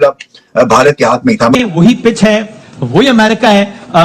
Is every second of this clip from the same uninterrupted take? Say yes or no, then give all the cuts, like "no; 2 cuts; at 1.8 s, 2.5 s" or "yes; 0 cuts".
no; 1 cut; at 1.5 s